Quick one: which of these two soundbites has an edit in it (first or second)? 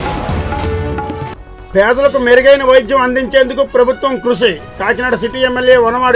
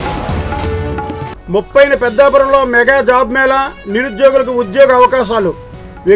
first